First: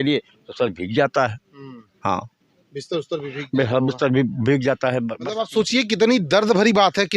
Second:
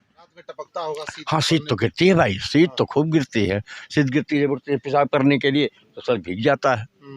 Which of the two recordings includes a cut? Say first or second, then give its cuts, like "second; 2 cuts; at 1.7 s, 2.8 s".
first; 1 cut; at 5.2 s